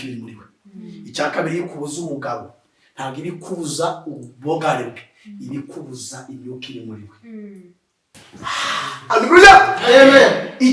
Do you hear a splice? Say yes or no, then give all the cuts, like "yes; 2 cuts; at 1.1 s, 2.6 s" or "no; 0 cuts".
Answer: yes; 1 cut; at 8.2 s